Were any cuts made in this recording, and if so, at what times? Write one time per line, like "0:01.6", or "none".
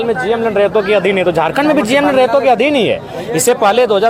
none